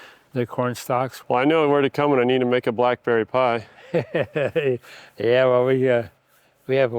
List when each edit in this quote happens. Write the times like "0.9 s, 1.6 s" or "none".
1.2 s